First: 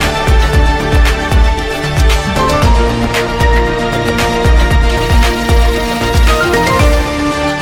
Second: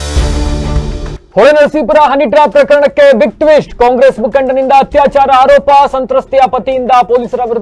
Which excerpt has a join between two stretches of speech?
second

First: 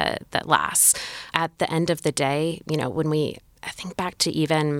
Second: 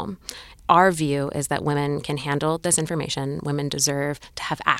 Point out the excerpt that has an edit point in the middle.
first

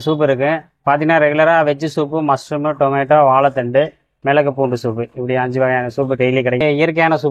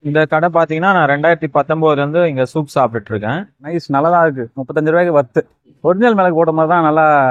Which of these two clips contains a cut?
second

